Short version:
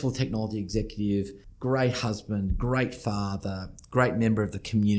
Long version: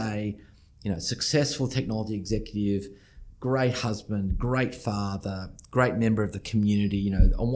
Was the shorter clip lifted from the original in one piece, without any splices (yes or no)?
no